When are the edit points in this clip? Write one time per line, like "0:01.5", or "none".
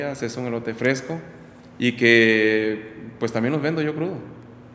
none